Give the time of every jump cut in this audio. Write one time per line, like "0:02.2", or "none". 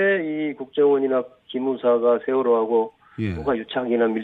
none